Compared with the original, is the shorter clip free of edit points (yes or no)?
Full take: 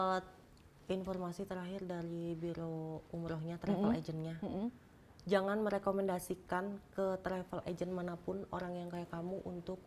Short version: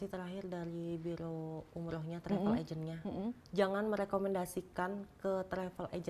no